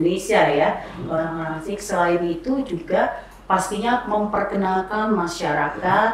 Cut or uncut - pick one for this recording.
uncut